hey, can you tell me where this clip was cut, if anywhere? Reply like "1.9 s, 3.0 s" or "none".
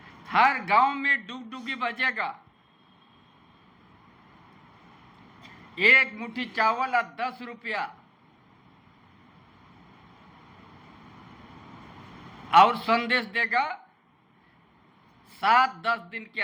none